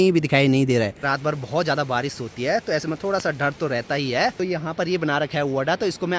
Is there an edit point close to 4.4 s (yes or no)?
yes